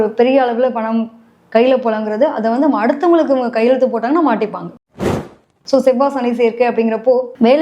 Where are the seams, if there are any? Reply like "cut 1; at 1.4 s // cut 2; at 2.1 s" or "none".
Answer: cut 1; at 5.1 s